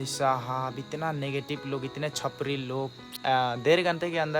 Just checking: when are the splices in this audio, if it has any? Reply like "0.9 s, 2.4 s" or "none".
3.2 s